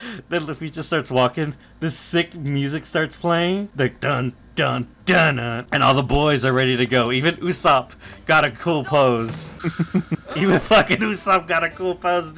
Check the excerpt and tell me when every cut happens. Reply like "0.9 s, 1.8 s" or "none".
3.7 s, 5.6 s, 9.4 s